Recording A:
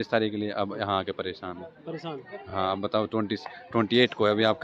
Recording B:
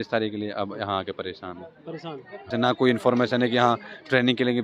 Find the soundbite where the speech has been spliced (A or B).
B